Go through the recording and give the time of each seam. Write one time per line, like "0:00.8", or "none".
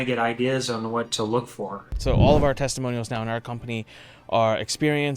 0:02.0